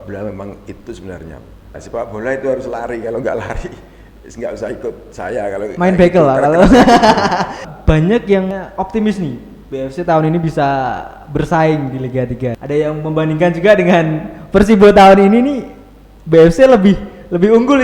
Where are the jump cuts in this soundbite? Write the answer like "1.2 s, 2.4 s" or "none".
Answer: 1.8 s, 7.7 s, 8.5 s, 12.6 s